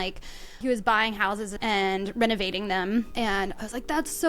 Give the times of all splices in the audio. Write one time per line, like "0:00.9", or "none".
0:01.6
0:03.1